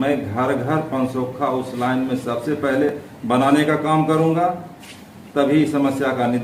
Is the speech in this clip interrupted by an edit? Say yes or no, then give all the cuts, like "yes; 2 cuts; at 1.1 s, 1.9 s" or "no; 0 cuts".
no; 0 cuts